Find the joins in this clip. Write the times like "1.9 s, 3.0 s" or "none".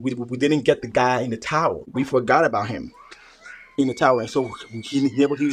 none